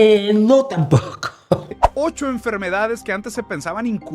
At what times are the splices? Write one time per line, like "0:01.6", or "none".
0:01.7